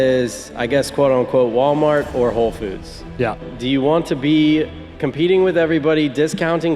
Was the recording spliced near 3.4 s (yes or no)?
yes